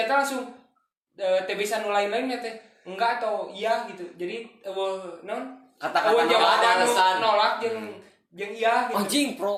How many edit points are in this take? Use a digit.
0